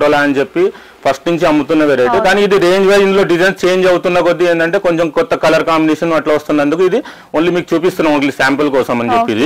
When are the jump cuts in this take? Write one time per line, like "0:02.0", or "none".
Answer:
none